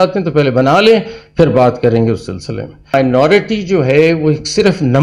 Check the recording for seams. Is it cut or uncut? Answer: cut